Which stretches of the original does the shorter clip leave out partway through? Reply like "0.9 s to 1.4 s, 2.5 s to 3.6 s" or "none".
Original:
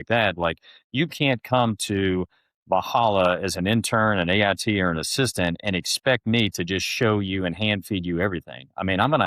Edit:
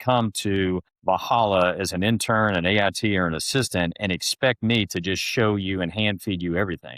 2.3 s to 2.5 s